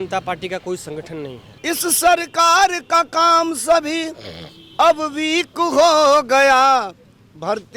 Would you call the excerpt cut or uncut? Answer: cut